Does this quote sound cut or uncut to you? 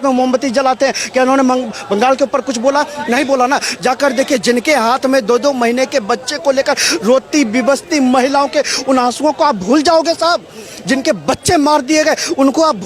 uncut